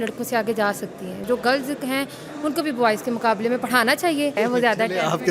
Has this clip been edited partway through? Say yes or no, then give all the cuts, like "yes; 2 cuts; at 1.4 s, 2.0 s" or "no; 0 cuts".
yes; 2 cuts; at 1.3 s, 4.4 s